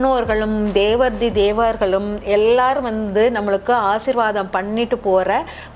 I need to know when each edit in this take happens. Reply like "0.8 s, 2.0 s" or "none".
none